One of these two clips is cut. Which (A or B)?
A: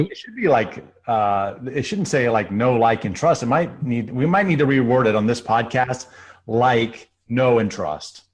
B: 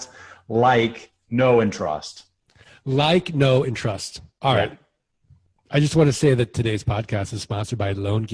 A